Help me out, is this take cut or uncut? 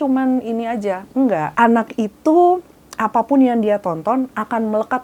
cut